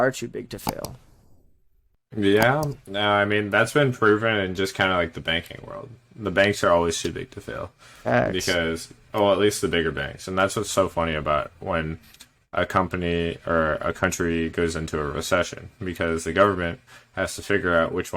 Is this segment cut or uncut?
uncut